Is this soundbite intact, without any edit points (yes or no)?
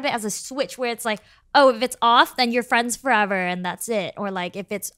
yes